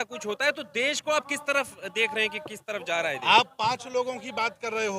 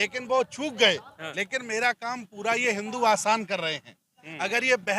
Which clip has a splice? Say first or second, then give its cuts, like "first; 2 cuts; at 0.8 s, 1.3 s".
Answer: second; 1 cut; at 1.2 s